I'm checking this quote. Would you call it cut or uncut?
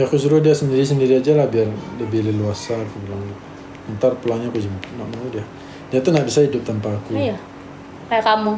uncut